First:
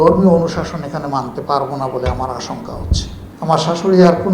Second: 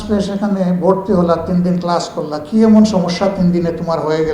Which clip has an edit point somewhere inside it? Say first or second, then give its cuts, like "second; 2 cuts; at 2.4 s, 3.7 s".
first; 1 cut; at 3.2 s